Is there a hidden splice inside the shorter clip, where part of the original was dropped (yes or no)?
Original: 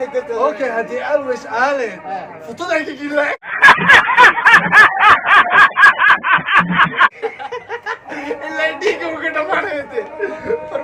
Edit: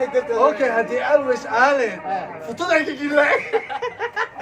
yes